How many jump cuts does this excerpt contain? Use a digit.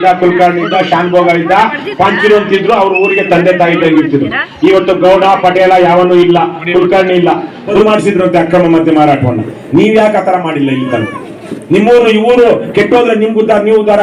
1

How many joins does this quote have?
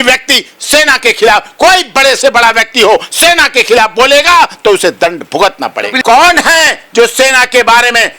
1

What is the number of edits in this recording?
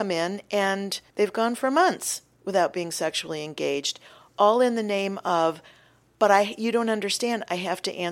1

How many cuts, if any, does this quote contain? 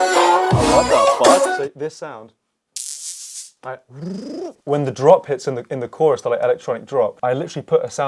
3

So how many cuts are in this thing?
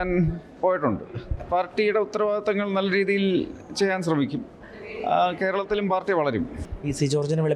2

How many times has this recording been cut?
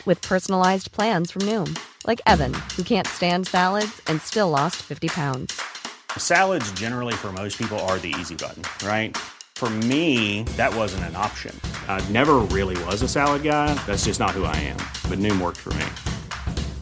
0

